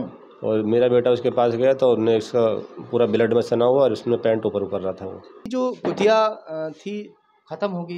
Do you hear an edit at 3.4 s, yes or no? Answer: no